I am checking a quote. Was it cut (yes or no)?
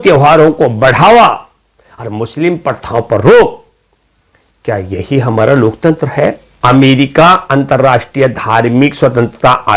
yes